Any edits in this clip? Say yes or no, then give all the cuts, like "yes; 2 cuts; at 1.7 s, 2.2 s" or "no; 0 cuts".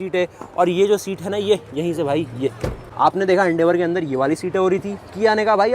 yes; 1 cut; at 2.8 s